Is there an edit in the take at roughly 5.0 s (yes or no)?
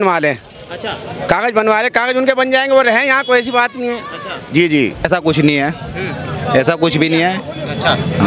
yes